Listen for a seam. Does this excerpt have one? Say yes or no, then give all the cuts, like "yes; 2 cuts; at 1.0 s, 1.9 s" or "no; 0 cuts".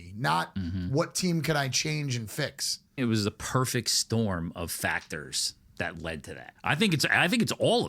yes; 2 cuts; at 3.0 s, 6.5 s